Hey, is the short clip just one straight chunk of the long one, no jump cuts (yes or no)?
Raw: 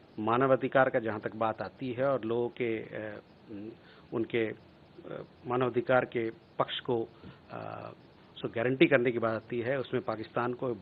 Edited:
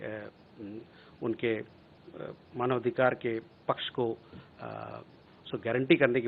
yes